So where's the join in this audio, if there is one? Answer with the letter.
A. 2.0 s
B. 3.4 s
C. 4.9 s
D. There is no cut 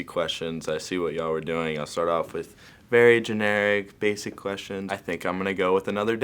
C